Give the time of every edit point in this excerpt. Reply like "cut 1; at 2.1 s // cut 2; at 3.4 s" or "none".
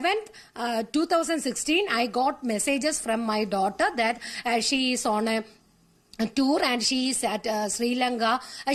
none